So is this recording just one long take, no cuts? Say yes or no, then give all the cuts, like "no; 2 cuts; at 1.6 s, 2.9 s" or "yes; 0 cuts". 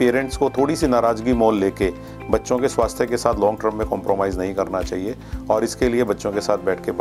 yes; 0 cuts